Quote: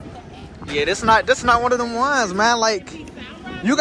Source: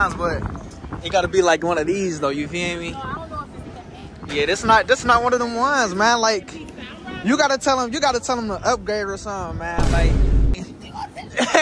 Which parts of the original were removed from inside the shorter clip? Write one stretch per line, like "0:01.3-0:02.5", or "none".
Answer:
none